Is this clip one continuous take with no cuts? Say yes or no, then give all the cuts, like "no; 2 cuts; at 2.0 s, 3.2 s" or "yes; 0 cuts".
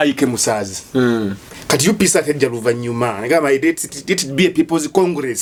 yes; 0 cuts